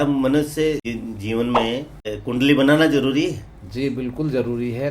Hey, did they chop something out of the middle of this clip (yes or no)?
yes